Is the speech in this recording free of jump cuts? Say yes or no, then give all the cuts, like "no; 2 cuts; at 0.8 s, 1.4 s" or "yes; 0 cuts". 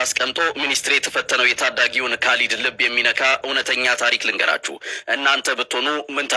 yes; 0 cuts